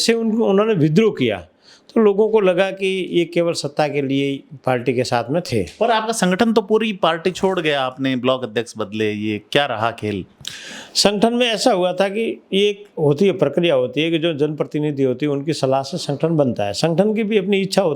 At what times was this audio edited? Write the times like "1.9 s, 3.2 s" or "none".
none